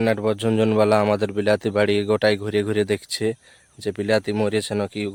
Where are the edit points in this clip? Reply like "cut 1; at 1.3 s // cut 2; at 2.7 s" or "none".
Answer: none